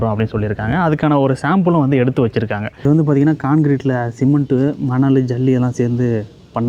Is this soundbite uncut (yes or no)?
no